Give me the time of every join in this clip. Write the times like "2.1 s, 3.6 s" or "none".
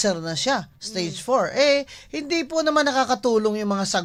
none